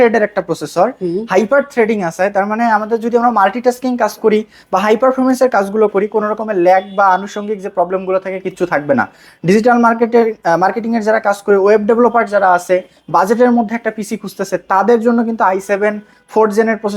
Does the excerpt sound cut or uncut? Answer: uncut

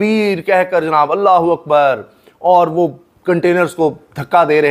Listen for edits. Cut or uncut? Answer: uncut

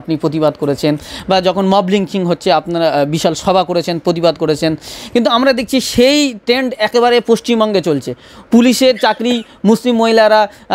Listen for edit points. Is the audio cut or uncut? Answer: uncut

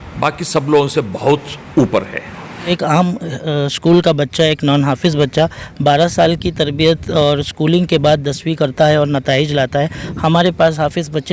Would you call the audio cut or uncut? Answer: cut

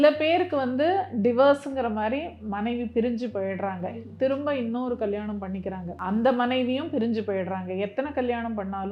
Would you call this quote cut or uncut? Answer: cut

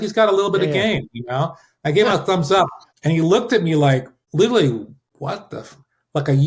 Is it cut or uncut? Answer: cut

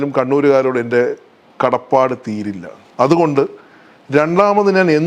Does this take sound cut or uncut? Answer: cut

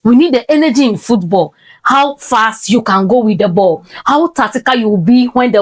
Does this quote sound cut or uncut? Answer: uncut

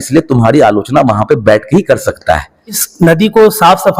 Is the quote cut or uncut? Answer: cut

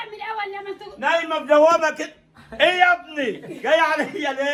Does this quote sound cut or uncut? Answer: uncut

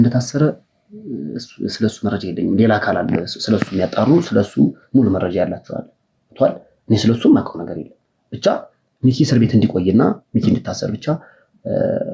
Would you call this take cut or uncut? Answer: uncut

